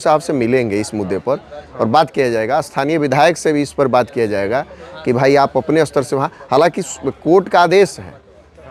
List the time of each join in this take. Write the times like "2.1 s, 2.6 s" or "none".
none